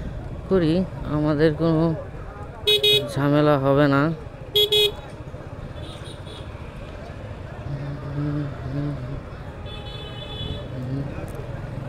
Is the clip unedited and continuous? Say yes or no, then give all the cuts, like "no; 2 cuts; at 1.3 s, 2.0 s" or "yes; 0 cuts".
yes; 0 cuts